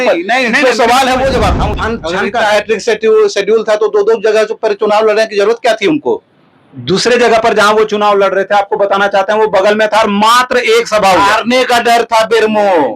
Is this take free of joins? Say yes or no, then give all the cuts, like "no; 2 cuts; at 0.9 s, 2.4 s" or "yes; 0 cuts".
no; 1 cut; at 1.8 s